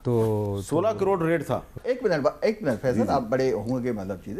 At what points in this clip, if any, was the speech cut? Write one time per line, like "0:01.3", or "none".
0:01.7